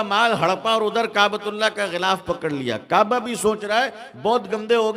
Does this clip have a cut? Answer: no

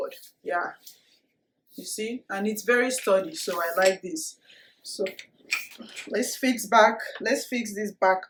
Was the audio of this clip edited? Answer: no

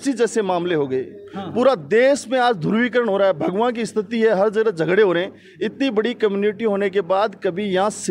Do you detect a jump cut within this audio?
no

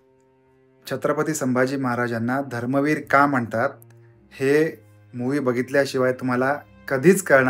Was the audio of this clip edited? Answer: no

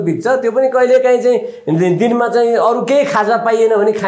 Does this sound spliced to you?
no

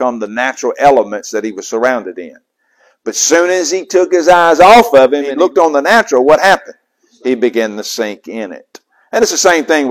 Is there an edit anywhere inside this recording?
yes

